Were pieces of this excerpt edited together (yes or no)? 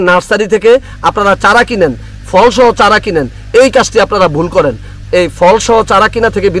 no